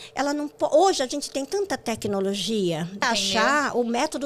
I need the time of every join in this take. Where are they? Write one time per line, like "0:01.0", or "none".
0:03.0